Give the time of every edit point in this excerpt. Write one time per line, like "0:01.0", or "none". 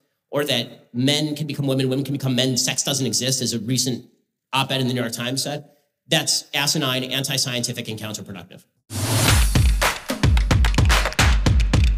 0:09.0